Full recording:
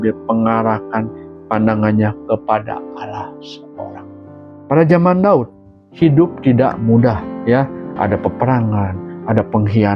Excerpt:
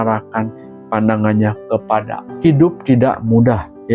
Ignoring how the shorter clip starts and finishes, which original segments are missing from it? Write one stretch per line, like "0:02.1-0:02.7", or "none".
0:02.8-0:05.8